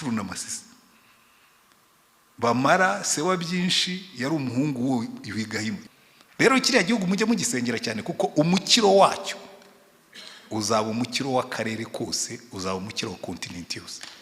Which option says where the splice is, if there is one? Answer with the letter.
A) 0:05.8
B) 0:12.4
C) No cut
A